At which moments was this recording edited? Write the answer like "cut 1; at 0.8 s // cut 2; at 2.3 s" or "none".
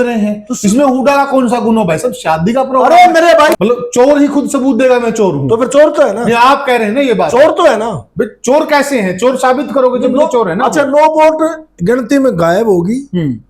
cut 1; at 3.6 s